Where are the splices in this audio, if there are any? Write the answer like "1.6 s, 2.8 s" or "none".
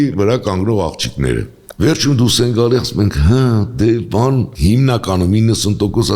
1.6 s